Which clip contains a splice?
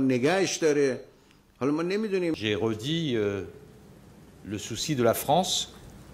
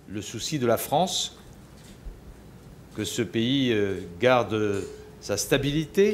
first; 1 cut; at 2.3 s

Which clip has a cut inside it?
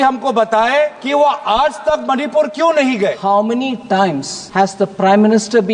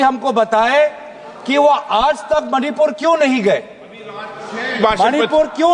first; 3 cuts; at 1.0 s, 3.2 s, 4.3 s

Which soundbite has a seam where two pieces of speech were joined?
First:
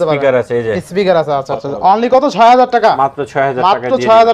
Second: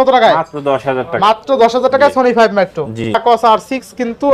second; 1 cut; at 3.1 s

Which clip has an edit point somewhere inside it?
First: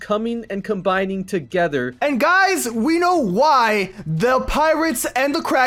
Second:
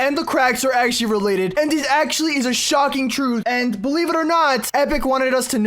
second; 3 cuts; at 1.5 s, 3.4 s, 4.6 s

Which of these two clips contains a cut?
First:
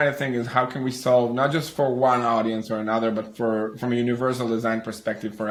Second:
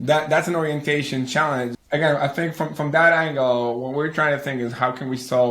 second; 1 cut; at 1.8 s

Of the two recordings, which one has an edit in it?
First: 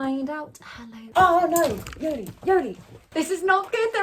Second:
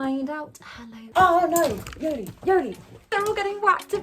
second; 1 cut; at 3.1 s

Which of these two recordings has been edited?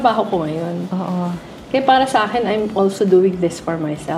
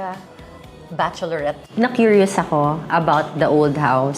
second; 1 cut; at 1.7 s

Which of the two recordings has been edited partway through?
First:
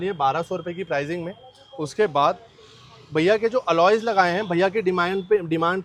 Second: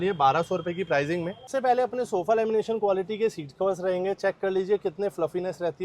second; 1 cut; at 1.5 s

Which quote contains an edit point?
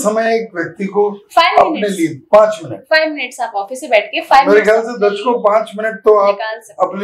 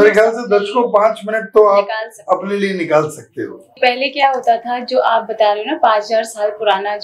second; 1 cut; at 3.7 s

